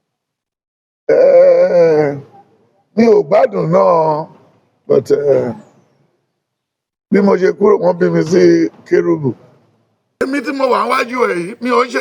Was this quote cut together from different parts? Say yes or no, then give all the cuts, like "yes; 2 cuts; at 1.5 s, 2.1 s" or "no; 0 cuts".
yes; 1 cut; at 10.2 s